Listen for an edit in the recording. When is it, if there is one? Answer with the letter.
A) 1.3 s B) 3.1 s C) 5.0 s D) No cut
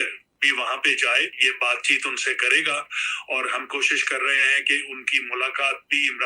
A